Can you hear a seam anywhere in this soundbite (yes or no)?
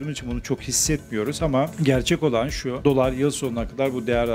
yes